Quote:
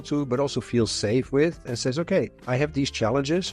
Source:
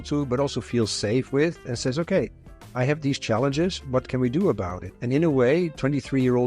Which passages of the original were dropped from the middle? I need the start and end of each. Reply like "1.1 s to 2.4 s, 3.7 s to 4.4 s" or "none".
2.4 s to 2.6 s